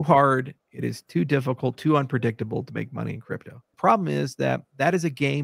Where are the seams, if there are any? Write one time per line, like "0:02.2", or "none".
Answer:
0:03.6